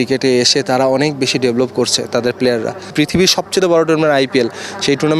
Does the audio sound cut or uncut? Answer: cut